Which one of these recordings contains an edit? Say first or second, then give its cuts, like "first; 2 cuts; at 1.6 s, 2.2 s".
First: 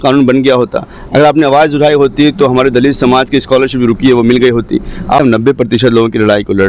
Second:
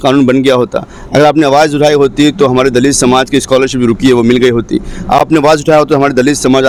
first; 1 cut; at 5.2 s